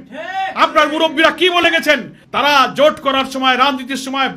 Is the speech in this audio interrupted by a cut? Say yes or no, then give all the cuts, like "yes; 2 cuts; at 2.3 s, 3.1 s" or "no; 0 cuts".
no; 0 cuts